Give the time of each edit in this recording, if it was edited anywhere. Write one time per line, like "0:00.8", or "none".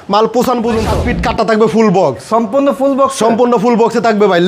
0:01.0